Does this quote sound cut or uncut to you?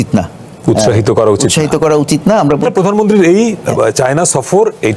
cut